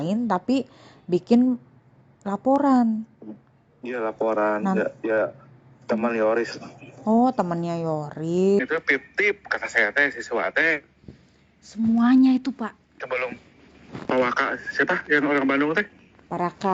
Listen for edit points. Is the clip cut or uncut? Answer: cut